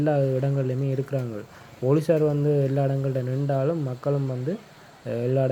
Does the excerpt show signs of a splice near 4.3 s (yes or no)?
no